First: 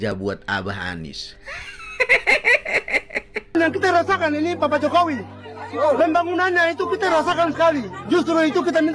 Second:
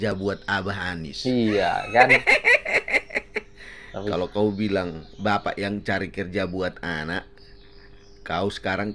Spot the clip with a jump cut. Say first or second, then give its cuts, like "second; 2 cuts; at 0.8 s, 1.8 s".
first; 1 cut; at 3.5 s